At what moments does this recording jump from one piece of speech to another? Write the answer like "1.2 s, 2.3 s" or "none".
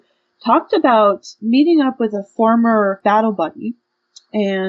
1.3 s, 3.0 s